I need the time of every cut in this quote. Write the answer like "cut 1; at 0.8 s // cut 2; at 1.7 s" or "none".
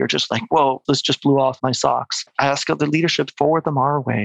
cut 1; at 0.8 s // cut 2; at 2.0 s

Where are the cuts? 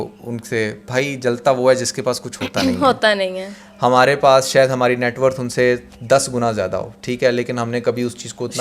none

